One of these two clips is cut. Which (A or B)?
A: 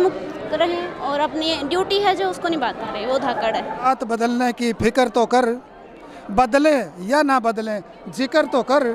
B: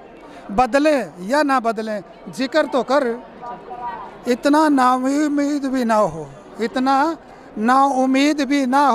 A